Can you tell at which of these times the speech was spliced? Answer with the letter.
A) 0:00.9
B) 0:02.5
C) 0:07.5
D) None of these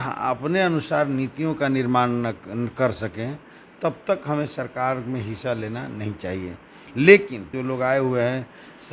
C